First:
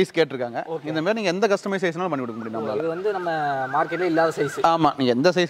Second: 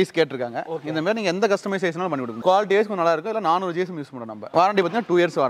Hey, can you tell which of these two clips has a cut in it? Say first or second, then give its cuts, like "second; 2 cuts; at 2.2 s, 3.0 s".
second; 2 cuts; at 2.4 s, 4.4 s